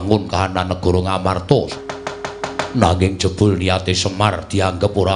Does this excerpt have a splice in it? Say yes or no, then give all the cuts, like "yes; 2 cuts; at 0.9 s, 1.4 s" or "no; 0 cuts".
yes; 1 cut; at 1.7 s